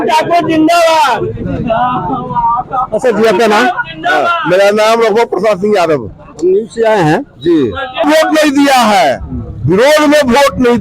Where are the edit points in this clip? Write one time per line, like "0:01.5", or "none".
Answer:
0:08.0